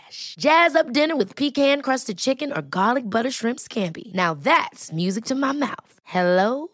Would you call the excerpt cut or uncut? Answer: uncut